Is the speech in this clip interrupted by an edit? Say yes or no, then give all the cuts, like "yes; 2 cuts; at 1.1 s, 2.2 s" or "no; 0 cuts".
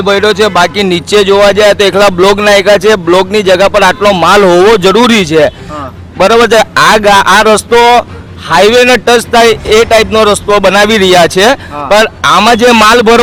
no; 0 cuts